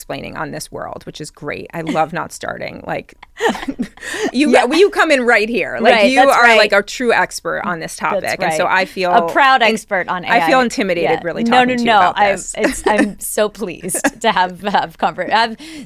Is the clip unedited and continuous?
yes; 0 cuts

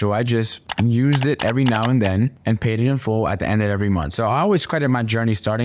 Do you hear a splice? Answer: yes; 1 cut; at 4.1 s

